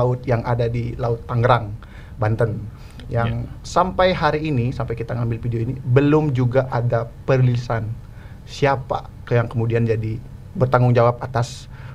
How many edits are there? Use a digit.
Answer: 0